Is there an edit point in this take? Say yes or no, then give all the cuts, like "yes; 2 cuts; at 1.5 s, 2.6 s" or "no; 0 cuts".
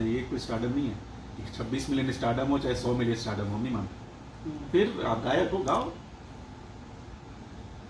no; 0 cuts